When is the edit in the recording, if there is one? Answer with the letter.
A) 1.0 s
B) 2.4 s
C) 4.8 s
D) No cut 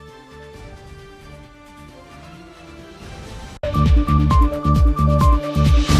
D